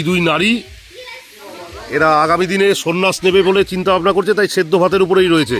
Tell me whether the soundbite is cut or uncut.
uncut